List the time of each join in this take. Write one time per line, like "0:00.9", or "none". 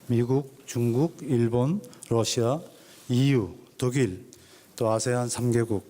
0:04.1